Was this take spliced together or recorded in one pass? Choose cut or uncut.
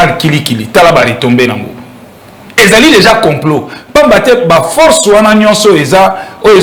uncut